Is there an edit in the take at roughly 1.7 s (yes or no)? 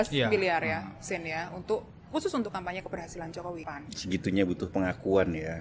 no